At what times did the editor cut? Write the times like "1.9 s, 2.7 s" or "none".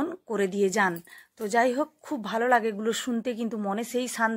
none